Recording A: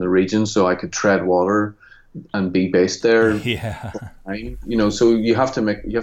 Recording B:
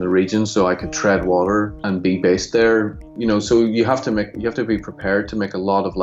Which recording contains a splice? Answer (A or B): B